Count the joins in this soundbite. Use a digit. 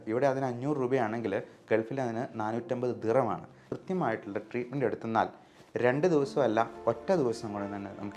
1